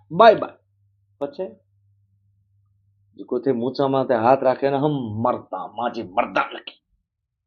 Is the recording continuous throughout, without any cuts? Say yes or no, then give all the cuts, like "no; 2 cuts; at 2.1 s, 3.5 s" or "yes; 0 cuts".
yes; 0 cuts